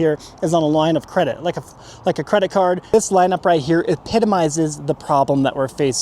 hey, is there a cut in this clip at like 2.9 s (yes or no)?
yes